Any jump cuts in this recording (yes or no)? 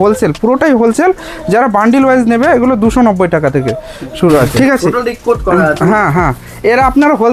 yes